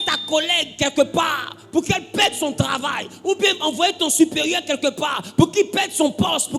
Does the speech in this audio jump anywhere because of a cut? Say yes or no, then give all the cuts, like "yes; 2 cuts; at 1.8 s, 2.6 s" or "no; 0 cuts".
no; 0 cuts